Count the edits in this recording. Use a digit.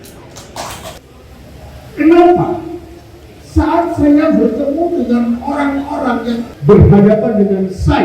2